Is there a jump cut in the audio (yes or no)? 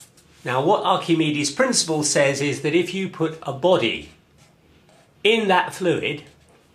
yes